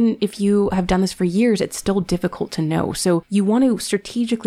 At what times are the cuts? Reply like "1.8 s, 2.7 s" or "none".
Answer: 3.3 s